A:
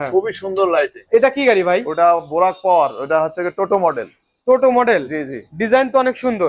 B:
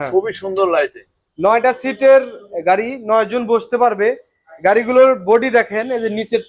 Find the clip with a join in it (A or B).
A